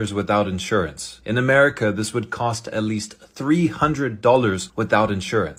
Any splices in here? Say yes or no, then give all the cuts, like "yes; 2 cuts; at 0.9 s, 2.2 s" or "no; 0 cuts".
no; 0 cuts